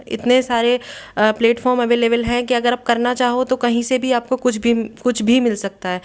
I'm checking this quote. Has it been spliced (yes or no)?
no